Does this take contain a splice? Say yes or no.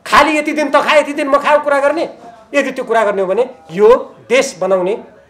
no